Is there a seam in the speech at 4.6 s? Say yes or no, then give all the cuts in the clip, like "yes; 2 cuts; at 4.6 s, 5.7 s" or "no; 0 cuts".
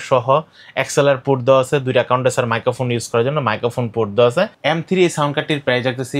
yes; 1 cut; at 4.6 s